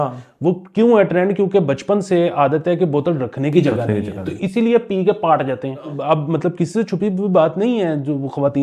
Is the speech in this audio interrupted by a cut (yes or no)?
yes